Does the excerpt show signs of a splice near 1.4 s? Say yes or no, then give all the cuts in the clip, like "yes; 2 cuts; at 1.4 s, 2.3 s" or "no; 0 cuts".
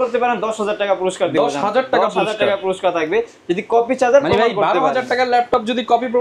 no; 0 cuts